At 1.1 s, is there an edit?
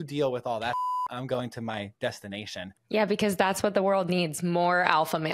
no; 1 cut; at 2.7 s

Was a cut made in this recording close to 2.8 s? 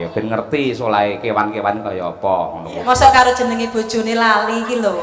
yes; 1 cut; at 2.8 s

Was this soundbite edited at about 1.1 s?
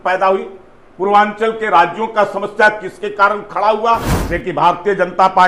no; 1 cut; at 4.2 s

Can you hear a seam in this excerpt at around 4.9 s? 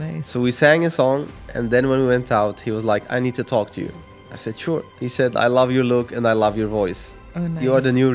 yes; 1 cut; at 4.9 s

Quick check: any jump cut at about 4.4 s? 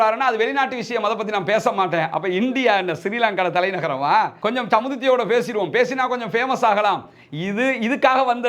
yes; 1 cut; at 4.4 s

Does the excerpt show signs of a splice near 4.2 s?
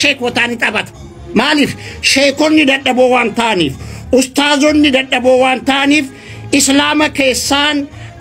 no; 0 cuts

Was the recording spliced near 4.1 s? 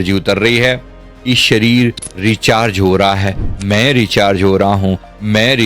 no; 1 cut; at 1.1 s

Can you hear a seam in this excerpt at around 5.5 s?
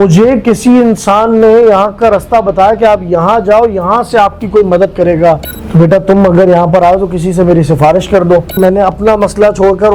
yes; 2 cuts; at 5.5 s, 8.6 s

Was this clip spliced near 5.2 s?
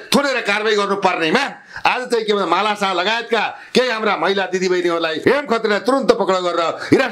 yes; 1 cut; at 5.2 s

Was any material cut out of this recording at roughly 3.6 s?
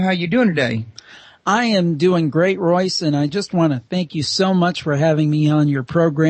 yes; 1 cut; at 3.6 s

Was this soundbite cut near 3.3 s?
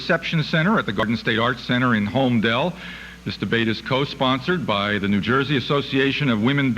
no; 1 cut; at 1.0 s

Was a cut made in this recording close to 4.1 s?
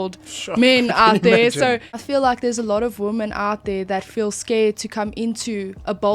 no; 1 cut; at 2.0 s

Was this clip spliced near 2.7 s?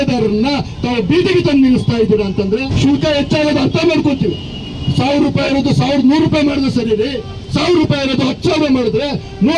yes; 1 cut; at 2.7 s

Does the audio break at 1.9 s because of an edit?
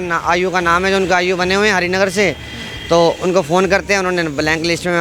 no; 0 cuts

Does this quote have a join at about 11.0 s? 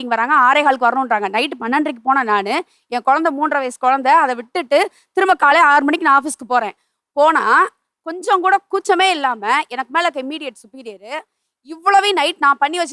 no; 0 cuts

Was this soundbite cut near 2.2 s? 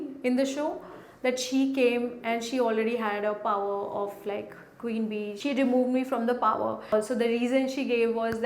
no; 2 cuts; at 5.3 s, 6.9 s

